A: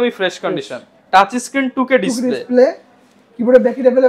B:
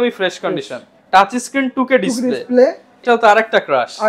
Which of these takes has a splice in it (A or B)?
B